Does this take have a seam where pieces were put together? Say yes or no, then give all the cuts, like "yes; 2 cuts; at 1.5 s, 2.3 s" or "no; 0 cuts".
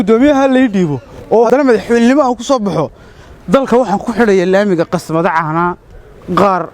yes; 1 cut; at 1.5 s